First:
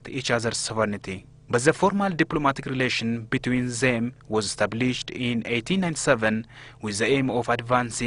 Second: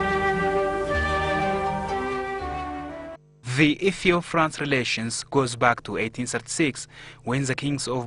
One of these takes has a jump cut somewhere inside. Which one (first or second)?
first